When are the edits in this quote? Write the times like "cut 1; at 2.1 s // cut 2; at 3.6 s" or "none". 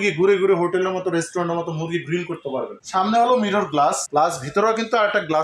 cut 1; at 2.8 s